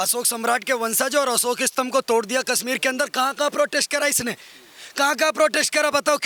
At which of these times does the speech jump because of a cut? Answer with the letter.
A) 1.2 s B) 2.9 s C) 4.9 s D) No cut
D